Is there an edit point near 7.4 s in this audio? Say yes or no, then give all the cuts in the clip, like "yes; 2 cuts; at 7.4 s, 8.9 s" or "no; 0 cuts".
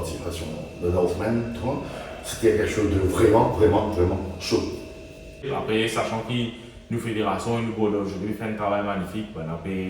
no; 1 cut; at 5.5 s